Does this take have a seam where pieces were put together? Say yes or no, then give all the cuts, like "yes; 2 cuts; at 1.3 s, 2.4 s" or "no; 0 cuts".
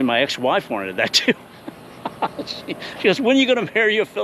no; 0 cuts